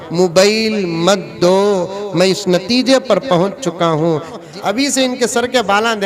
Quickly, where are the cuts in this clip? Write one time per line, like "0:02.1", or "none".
0:04.5